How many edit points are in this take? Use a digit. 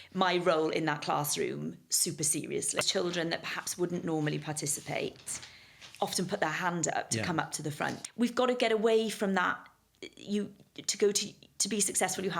2